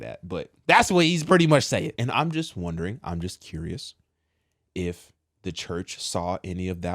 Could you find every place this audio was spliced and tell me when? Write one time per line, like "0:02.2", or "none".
0:02.0